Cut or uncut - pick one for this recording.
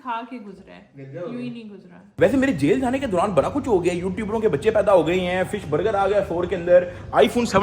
cut